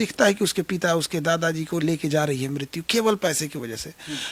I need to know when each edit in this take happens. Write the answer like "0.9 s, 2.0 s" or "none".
none